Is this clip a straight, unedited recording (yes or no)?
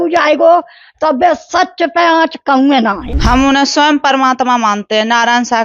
no